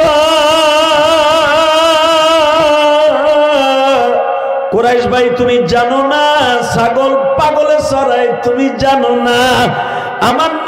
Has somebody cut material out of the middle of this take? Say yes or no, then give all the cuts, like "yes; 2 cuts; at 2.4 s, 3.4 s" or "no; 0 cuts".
yes; 1 cut; at 4.7 s